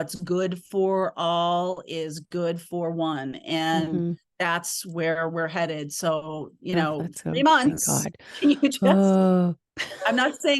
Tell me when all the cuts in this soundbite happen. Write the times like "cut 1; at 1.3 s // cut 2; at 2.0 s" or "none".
cut 1; at 4.3 s